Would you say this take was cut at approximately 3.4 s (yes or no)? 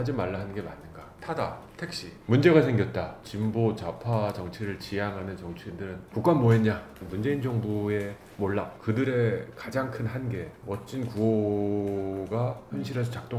no